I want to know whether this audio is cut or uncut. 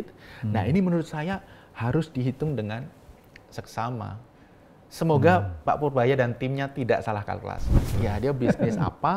cut